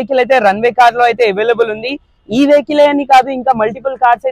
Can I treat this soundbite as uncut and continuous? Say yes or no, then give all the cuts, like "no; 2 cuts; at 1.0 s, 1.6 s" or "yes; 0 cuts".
yes; 0 cuts